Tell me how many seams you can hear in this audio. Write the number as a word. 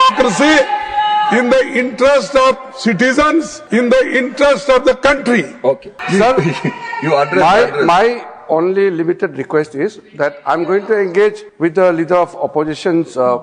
three